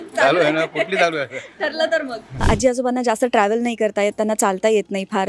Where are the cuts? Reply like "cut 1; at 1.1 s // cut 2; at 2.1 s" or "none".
cut 1; at 2.4 s